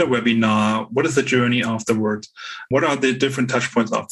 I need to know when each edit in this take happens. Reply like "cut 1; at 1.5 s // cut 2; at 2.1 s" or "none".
cut 1; at 2.7 s